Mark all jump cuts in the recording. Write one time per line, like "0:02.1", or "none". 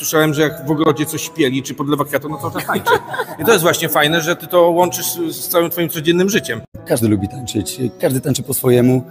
0:06.8

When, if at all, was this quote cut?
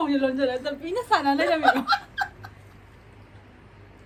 none

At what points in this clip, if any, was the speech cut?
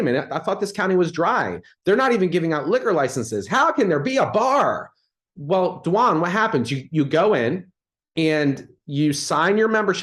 none

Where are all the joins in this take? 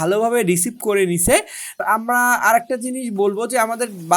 0:01.8

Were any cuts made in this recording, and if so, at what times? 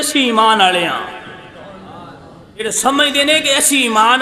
0:02.6

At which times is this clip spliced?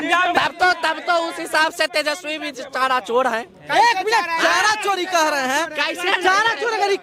none

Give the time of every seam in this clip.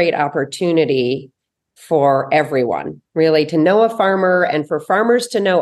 none

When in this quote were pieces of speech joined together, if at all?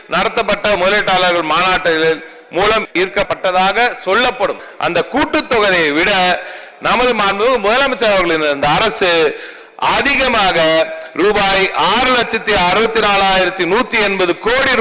0:00.8
0:02.9
0:04.6

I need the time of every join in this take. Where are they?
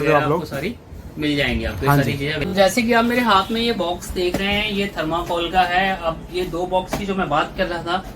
0:02.4

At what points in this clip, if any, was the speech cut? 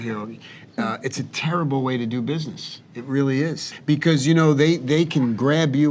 0:03.7

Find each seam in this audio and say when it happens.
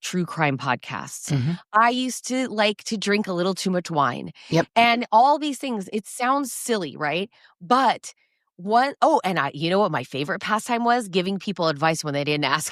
none

